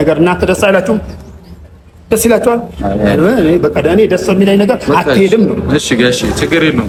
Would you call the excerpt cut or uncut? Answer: uncut